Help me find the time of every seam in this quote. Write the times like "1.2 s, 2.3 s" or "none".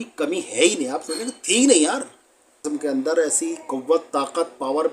2.6 s